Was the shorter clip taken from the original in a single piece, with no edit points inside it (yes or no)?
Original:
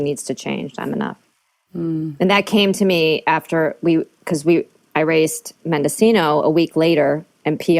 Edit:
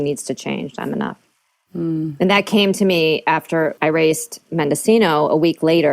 no